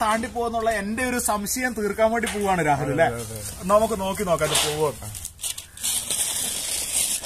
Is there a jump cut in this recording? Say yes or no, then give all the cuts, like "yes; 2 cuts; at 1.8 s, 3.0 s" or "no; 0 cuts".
no; 0 cuts